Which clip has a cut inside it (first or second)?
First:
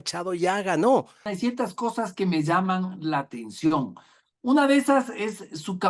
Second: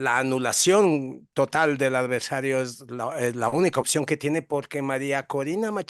first